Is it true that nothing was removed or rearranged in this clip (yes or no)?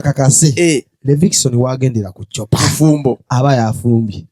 yes